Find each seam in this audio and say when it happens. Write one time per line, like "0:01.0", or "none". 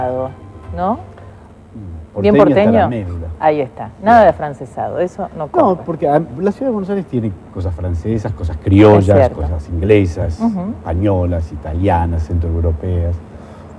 none